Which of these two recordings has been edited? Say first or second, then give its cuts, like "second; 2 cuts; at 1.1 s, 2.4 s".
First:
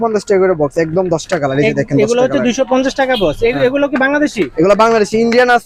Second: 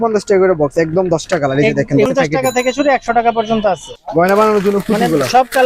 second; 2 cuts; at 2.1 s, 3.9 s